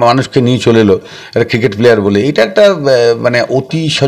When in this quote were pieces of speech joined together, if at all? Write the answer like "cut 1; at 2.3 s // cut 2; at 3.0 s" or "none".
none